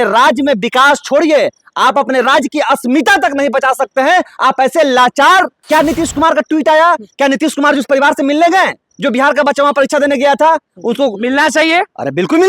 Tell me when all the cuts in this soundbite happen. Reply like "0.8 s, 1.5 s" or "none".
5.6 s